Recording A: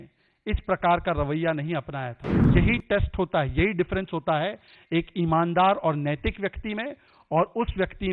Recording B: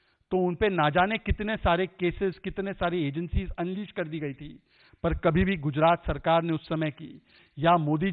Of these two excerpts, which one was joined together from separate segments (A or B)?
A